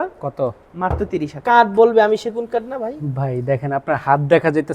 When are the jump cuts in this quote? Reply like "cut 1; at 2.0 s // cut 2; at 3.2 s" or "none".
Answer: cut 1; at 1.3 s